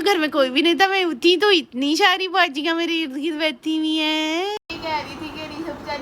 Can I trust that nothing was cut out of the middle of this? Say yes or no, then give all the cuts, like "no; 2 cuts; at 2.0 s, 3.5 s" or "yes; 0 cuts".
no; 1 cut; at 4.6 s